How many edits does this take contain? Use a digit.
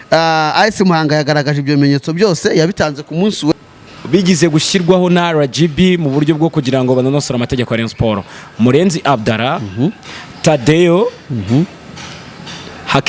1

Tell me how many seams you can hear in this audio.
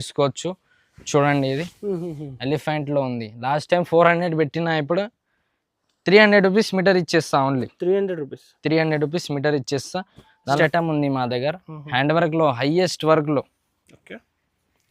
1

